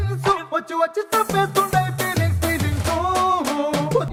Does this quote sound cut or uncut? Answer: uncut